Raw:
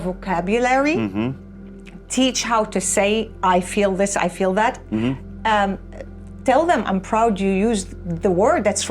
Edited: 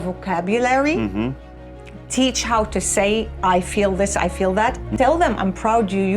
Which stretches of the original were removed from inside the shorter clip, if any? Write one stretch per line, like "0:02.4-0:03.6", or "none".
0:04.8-0:06.3